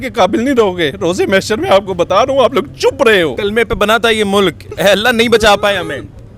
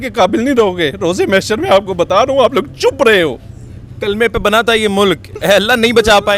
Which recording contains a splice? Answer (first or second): first